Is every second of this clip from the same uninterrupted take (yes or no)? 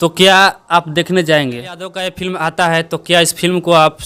no